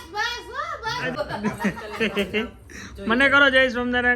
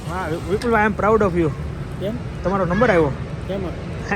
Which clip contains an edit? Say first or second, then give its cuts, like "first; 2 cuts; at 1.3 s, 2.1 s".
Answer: first; 1 cut; at 1.1 s